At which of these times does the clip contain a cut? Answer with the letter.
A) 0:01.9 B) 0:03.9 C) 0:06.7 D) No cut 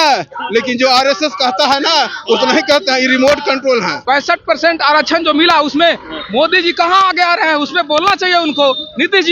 B